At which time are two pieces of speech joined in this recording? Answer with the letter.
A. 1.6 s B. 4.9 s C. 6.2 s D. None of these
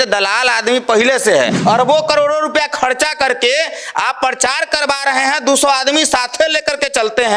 A